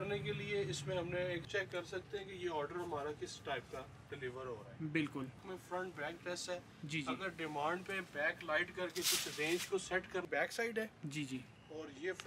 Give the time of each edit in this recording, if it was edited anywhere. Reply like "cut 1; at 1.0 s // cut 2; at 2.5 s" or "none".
cut 1; at 1.5 s // cut 2; at 5.4 s // cut 3; at 10.2 s

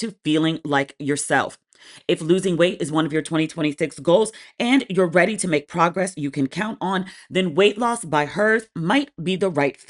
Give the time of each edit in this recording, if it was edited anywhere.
none

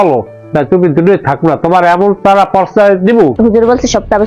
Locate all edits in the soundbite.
cut 1; at 3.3 s

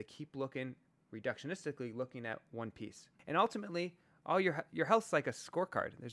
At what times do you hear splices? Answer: cut 1; at 3.2 s

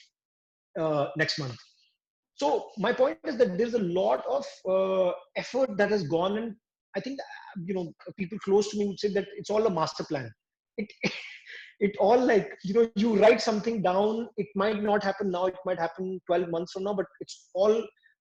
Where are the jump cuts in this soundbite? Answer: none

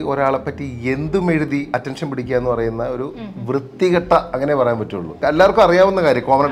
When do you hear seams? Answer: cut 1; at 1.7 s // cut 2; at 5.2 s

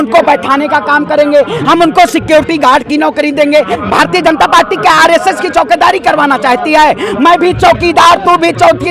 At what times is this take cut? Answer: cut 1; at 3.8 s

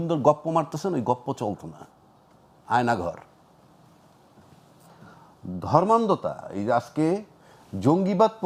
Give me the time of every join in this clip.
none

